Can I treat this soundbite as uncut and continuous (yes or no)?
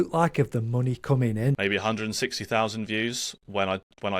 no